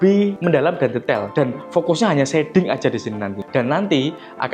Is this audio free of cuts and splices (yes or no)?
no